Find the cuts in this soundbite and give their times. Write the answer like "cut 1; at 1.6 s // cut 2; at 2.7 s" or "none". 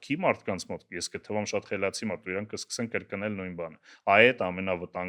none